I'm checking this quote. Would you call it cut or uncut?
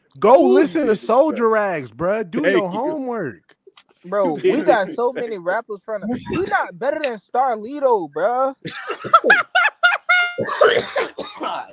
uncut